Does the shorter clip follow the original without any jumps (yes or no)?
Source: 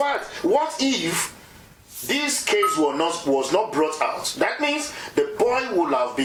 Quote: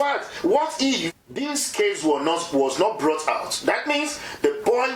no